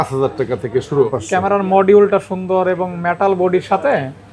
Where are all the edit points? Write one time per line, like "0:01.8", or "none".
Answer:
0:01.1